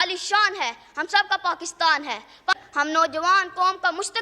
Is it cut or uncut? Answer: cut